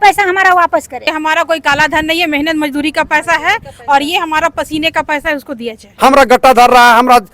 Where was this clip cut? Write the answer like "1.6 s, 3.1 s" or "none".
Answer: 1.0 s, 5.9 s